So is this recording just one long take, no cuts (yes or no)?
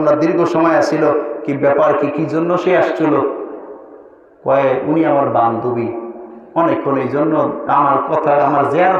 yes